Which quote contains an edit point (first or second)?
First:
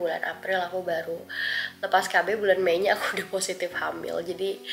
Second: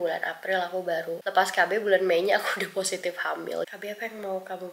second